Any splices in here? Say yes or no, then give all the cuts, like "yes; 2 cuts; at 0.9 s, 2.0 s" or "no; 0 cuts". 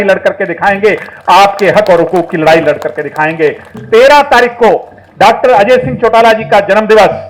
no; 0 cuts